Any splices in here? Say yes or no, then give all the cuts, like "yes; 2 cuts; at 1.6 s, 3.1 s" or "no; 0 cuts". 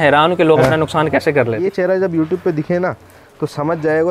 yes; 1 cut; at 1.6 s